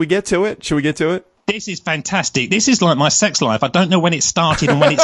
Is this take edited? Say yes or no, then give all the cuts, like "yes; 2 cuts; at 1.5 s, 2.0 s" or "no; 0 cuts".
yes; 1 cut; at 1.3 s